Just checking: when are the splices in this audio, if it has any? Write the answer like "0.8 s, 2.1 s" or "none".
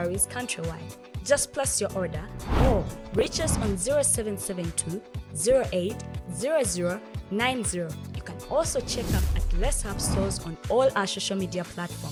none